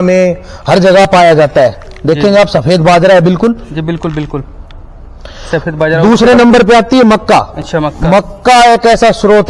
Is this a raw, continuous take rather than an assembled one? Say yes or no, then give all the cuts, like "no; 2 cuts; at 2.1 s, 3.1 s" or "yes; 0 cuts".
yes; 0 cuts